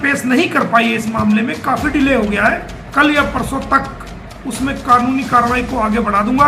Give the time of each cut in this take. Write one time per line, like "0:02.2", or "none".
0:02.8